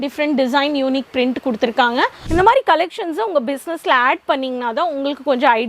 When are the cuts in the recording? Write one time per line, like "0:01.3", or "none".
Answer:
0:02.2